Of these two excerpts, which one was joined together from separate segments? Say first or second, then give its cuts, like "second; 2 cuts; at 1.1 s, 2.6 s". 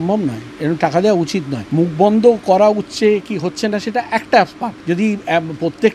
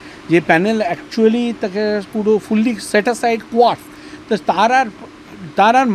first; 2 cuts; at 1.6 s, 4.7 s